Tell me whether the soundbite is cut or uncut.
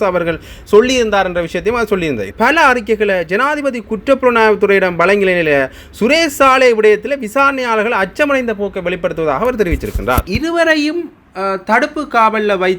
cut